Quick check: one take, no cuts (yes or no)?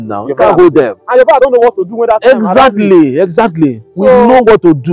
yes